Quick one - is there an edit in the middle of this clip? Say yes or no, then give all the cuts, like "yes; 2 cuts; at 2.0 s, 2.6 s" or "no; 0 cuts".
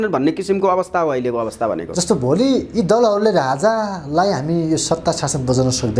no; 0 cuts